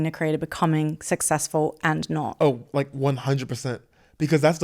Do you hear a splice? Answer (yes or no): yes